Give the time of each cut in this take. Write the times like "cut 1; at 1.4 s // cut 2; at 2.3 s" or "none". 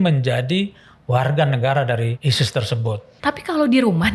cut 1; at 2.2 s // cut 2; at 3.1 s